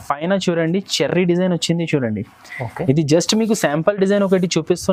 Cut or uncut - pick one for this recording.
uncut